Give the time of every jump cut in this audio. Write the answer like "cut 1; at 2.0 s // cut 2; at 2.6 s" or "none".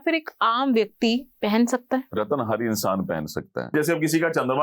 cut 1; at 2.1 s // cut 2; at 3.7 s